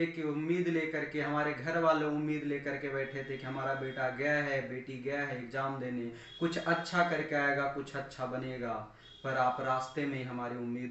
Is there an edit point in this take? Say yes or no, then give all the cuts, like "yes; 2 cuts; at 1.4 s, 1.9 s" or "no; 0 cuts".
no; 0 cuts